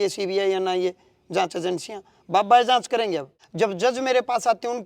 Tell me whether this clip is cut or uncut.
cut